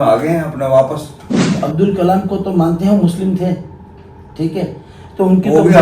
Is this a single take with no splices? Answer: no; 1 cut; at 1.5 s

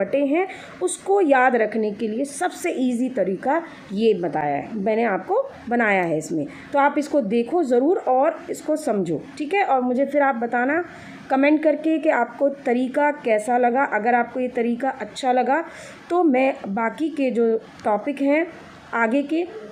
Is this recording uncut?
yes; 0 cuts

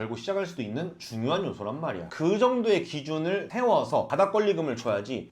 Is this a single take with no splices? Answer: no; 2 cuts; at 2.0 s, 3.7 s

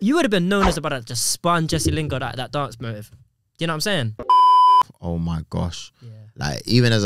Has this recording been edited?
yes; 1 cut; at 4.8 s

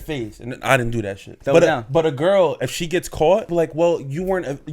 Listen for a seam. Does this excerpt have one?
yes; 2 cuts; at 1.3 s, 3.5 s

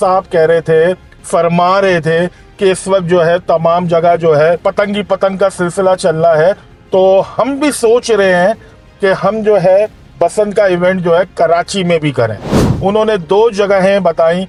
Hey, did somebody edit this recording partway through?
no; 0 cuts

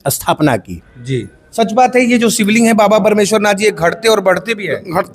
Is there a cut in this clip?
yes; 1 cut; at 1.4 s

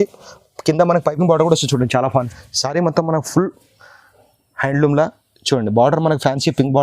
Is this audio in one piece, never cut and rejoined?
no; 1 cut; at 2.1 s

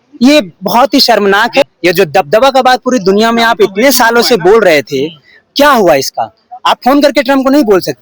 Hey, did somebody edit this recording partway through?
yes; 1 cut; at 1.6 s

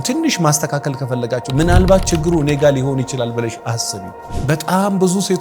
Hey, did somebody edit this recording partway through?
yes; 1 cut; at 4.2 s

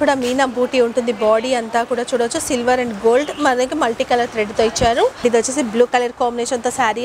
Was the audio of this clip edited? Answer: yes; 1 cut; at 5.2 s

